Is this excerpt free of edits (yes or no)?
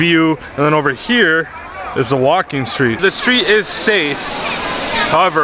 no